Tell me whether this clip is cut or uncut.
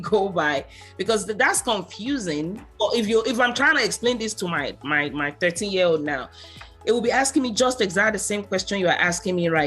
cut